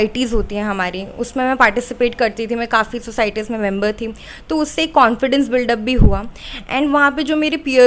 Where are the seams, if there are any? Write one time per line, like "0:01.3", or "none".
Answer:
none